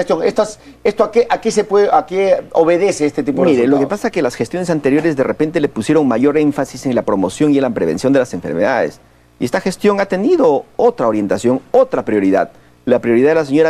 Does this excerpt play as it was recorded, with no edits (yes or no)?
no